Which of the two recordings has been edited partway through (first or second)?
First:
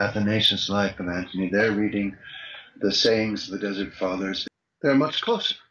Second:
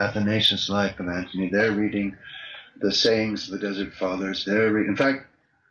first